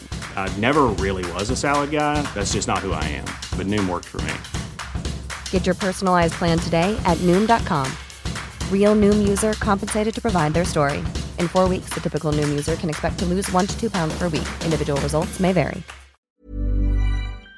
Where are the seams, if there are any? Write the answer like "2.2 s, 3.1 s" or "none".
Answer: 16.3 s